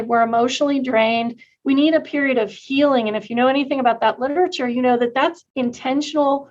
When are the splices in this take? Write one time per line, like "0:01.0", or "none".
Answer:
0:05.4

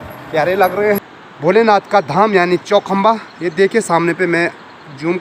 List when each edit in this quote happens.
0:01.0

